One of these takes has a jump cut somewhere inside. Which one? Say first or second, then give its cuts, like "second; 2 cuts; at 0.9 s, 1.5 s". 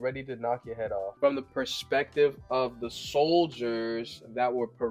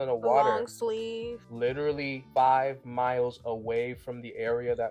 first; 1 cut; at 1.1 s